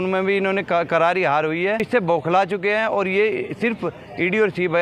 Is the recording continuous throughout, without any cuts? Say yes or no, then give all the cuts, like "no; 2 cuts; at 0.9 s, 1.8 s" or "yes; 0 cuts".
no; 1 cut; at 1.9 s